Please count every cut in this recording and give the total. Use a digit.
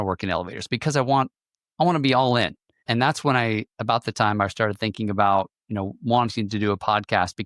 1